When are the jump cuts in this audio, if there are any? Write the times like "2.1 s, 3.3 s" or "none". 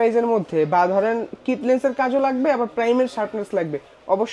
none